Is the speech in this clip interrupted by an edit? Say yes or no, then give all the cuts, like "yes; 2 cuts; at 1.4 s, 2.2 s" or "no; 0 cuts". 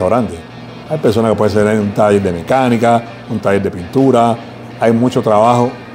no; 0 cuts